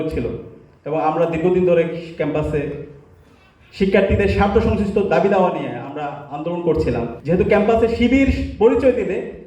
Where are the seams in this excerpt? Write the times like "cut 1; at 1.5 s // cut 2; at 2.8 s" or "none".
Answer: cut 1; at 7.1 s